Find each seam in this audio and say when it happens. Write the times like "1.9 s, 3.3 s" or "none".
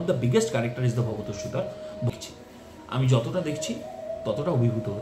2.1 s